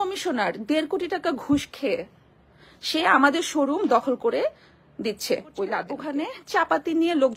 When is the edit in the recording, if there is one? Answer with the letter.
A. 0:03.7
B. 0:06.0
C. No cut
B